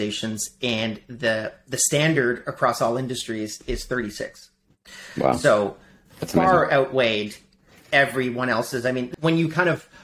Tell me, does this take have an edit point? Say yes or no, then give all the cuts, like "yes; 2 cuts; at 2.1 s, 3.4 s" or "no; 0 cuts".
no; 0 cuts